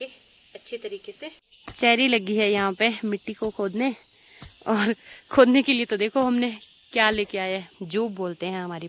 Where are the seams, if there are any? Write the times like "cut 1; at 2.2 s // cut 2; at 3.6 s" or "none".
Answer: cut 1; at 1.6 s // cut 2; at 7.7 s